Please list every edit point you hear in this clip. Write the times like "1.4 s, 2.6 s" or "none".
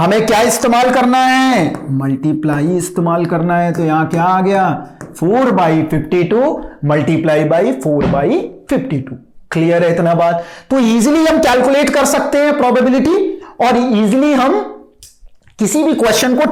none